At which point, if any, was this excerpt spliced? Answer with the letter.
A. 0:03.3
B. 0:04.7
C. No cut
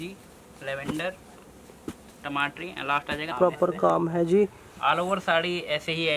A